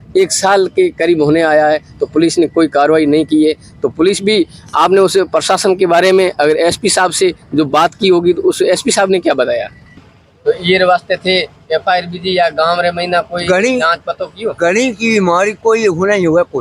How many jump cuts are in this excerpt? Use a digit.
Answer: 1